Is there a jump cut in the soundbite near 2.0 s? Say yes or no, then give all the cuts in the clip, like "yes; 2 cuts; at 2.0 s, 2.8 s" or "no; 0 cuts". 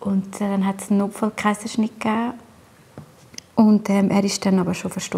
no; 0 cuts